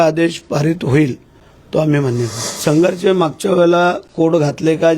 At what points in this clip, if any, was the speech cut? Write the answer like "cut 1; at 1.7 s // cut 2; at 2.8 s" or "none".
cut 1; at 2.4 s